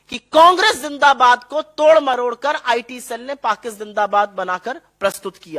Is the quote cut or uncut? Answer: uncut